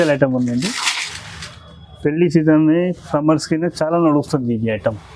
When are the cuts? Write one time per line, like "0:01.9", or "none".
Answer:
none